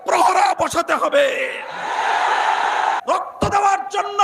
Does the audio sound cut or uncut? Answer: cut